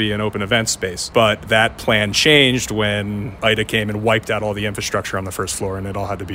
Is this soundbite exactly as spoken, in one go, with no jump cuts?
no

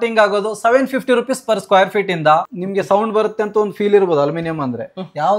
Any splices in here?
yes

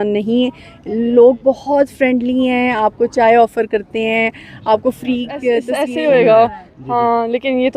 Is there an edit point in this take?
yes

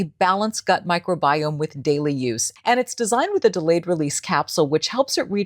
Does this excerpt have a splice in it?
yes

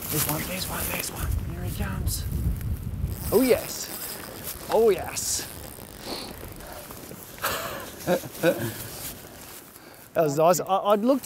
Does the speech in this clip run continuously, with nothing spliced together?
no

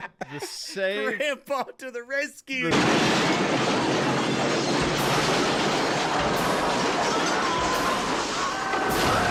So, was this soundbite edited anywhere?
no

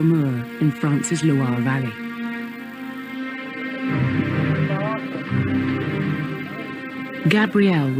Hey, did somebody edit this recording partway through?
yes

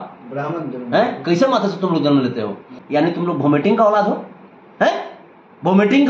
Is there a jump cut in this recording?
yes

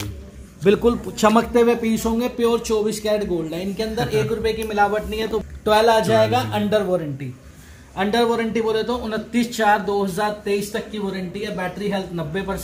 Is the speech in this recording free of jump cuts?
no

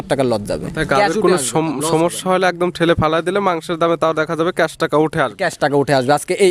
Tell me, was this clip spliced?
no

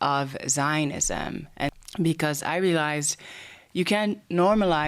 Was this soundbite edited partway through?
yes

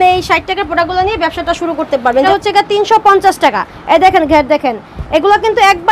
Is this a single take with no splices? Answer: no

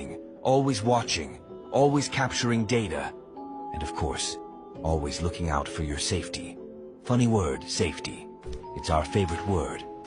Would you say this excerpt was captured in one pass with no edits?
yes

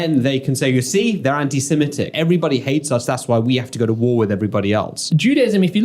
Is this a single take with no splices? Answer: no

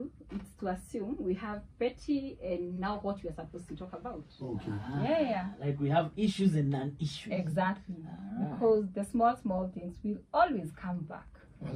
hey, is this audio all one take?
yes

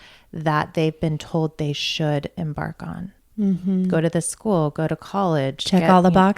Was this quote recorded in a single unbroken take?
no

